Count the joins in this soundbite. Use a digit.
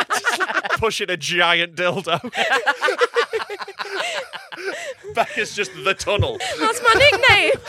2